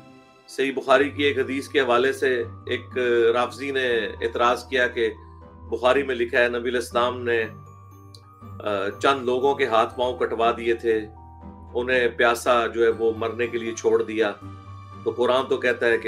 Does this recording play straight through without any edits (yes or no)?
yes